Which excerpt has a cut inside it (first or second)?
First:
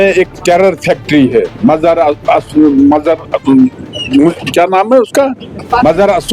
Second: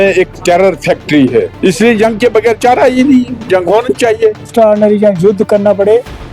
second